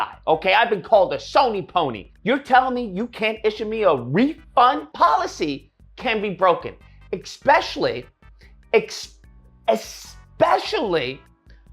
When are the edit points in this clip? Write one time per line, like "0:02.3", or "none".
0:02.0
0:04.9